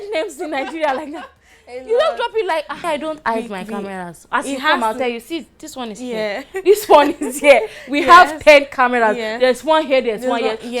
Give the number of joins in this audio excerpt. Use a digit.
1